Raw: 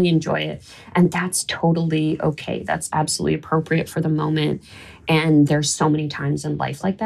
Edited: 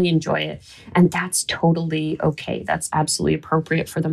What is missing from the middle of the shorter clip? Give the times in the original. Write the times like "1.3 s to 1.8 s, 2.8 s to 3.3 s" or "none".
none